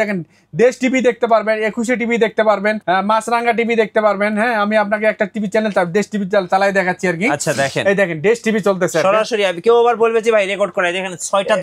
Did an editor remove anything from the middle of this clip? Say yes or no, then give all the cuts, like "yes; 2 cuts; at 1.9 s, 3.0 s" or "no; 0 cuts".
yes; 1 cut; at 2.8 s